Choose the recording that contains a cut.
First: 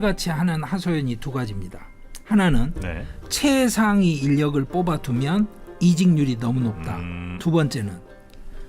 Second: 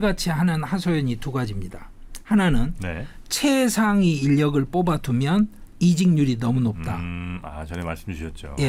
first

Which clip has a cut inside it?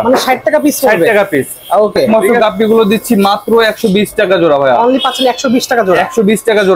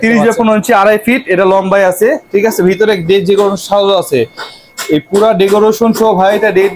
first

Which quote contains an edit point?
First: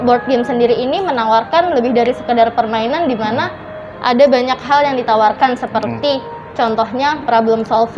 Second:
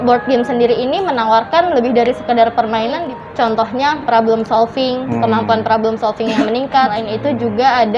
second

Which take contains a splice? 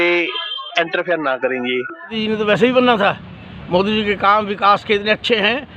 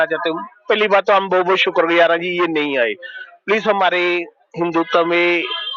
first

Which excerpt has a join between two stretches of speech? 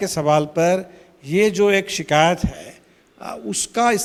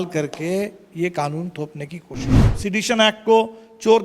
second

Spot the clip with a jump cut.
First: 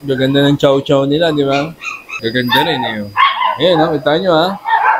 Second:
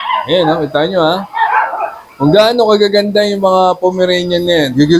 first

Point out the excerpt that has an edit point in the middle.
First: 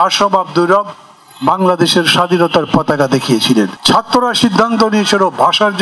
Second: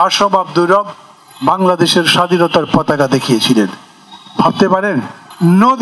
first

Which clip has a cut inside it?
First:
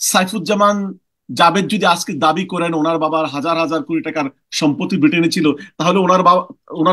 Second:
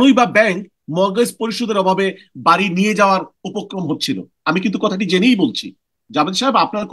second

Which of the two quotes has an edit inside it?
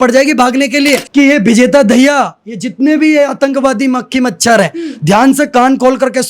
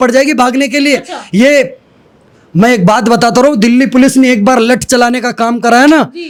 first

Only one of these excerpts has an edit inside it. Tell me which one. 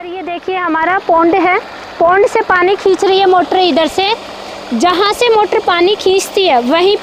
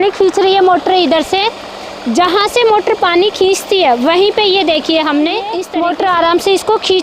second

